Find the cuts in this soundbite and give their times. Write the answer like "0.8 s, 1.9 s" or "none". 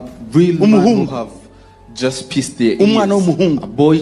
2.7 s

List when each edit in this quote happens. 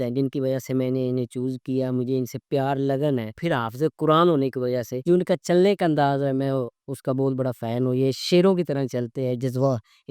3.4 s, 4.9 s

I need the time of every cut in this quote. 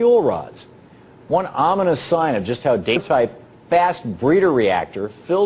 none

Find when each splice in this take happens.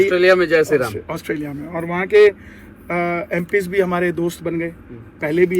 none

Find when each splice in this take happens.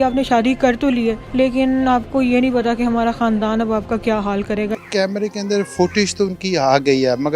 1.2 s, 4.7 s

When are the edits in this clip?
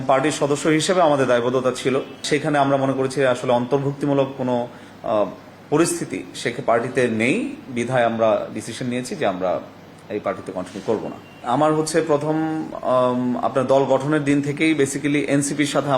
2.2 s

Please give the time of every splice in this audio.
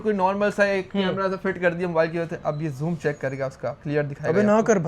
3.8 s

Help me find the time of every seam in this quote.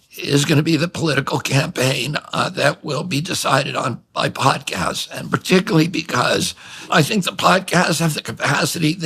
6.9 s

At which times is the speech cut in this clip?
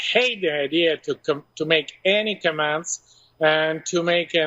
none

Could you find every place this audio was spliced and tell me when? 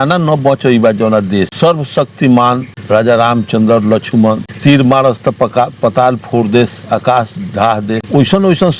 1.5 s, 2.7 s, 4.5 s, 8.0 s

